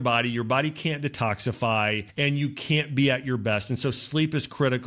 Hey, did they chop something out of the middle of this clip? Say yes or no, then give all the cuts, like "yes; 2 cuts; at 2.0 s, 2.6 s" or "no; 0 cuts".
yes; 1 cut; at 2.1 s